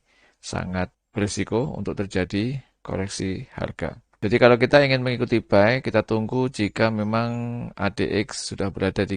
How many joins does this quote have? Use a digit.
2